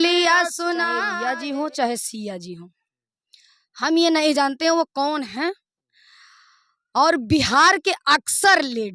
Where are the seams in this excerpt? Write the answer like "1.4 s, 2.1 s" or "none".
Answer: 0.9 s